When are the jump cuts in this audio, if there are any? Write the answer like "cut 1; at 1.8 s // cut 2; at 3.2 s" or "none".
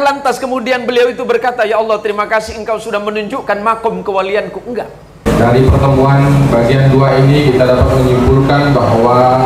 cut 1; at 5.3 s